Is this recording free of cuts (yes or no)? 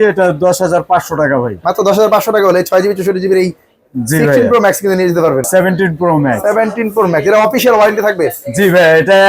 no